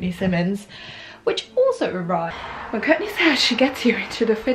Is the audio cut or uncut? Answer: cut